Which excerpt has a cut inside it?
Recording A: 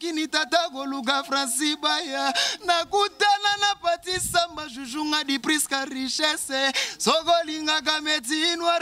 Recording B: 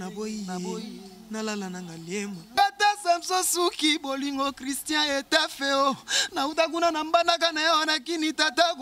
B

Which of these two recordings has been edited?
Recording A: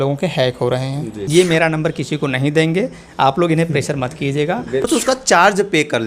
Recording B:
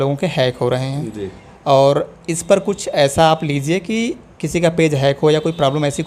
A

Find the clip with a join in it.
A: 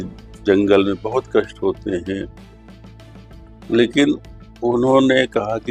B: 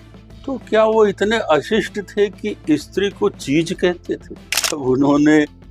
B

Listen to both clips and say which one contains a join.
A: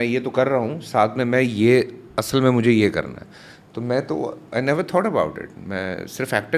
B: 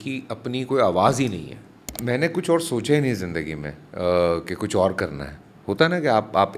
B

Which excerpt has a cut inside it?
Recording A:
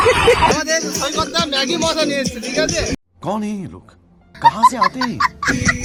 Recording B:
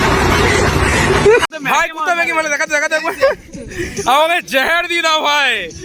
B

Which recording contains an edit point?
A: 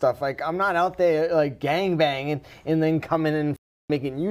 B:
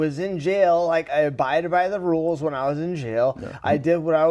B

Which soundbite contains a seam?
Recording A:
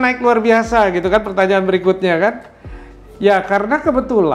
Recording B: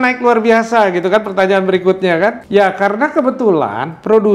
B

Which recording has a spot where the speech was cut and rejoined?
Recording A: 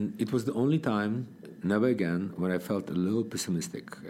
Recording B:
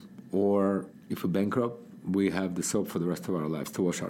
B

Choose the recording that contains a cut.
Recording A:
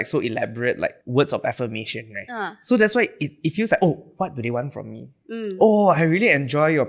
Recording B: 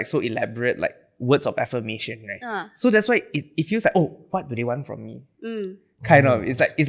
A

